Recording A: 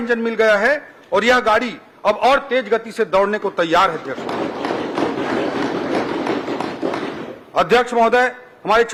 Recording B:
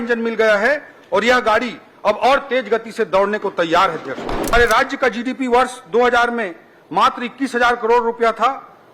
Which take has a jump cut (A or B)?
B